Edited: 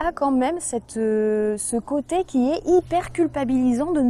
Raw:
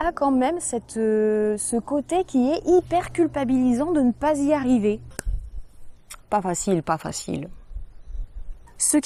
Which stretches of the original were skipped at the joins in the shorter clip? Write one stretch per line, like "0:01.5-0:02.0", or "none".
none